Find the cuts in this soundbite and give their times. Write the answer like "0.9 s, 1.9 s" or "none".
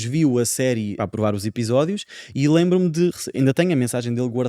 1.0 s